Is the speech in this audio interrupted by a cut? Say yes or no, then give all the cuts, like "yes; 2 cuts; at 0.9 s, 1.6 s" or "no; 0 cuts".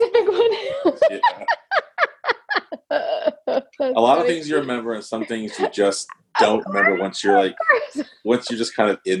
no; 0 cuts